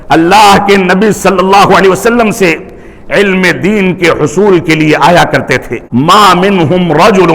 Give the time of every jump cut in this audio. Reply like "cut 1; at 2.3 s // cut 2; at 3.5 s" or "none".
cut 1; at 5.8 s